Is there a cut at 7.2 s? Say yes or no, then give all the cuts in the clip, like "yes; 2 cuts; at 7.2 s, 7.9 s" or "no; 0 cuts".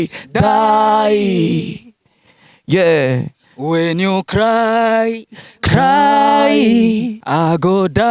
yes; 1 cut; at 7.2 s